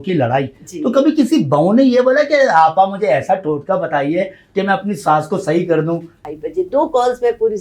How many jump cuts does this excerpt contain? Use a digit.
1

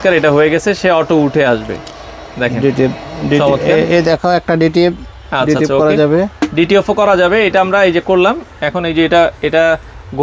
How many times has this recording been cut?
0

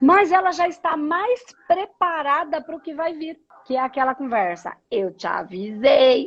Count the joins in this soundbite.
1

